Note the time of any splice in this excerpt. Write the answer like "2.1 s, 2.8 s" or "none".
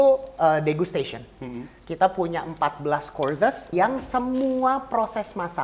3.7 s